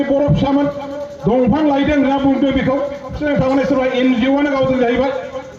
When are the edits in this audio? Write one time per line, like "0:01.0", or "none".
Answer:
0:03.2